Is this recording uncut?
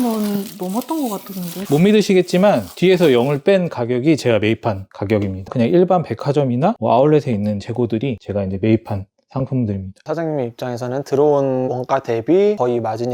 no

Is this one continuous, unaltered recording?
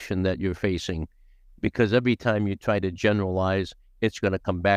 yes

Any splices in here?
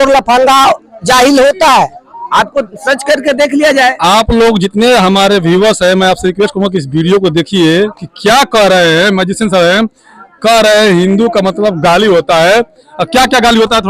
no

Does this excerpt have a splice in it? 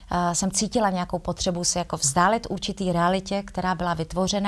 no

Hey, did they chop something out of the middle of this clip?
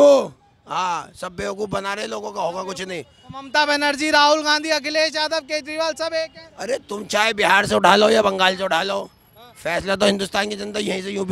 no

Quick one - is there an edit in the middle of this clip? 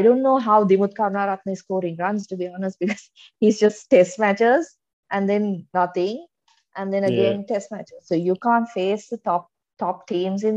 no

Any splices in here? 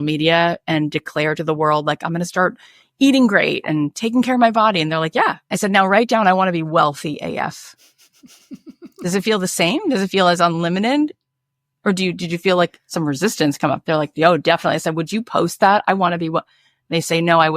yes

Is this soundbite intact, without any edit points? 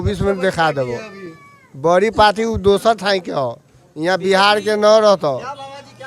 yes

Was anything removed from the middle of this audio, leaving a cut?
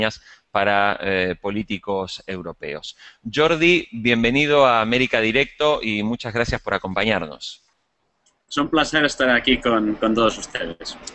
no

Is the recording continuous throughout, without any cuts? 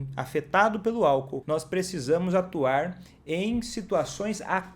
no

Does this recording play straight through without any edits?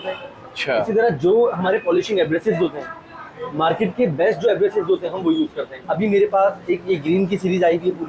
no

